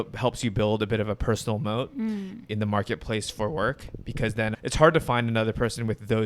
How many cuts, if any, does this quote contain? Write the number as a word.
one